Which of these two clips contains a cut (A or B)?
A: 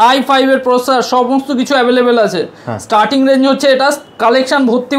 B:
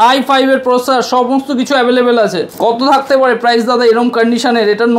B